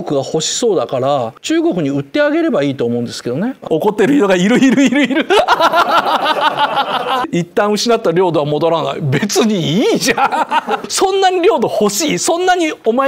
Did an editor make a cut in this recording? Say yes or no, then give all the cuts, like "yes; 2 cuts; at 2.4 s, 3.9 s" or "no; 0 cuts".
yes; 4 cuts; at 1.4 s, 3.6 s, 7.2 s, 10.9 s